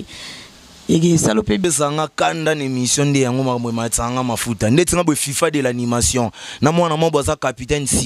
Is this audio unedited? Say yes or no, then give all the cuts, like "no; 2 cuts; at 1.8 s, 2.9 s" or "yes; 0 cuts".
no; 1 cut; at 1.6 s